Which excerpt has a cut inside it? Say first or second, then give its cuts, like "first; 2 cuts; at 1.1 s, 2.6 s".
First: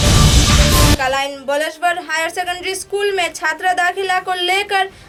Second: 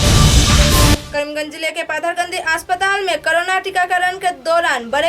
second; 1 cut; at 1.0 s